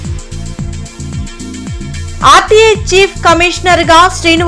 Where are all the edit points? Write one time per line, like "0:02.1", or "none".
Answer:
0:01.1